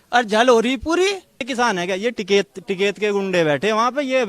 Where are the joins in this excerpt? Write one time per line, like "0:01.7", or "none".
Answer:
0:01.4